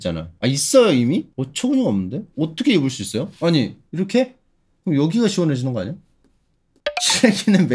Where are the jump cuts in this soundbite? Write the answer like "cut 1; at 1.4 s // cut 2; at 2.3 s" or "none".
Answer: cut 1; at 1.3 s // cut 2; at 6.8 s